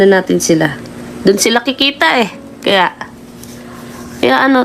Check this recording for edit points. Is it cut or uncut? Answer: uncut